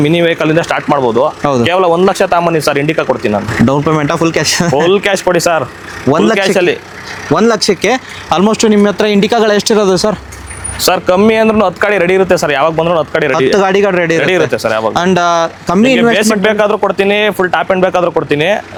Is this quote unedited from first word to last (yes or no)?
yes